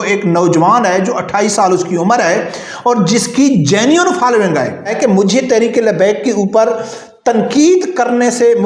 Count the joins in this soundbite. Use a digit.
1